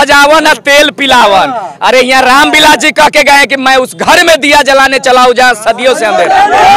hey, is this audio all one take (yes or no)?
yes